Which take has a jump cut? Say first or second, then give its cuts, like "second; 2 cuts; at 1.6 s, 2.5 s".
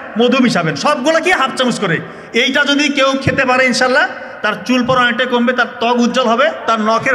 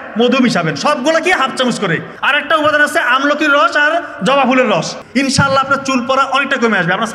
second; 2 cuts; at 2.1 s, 5.0 s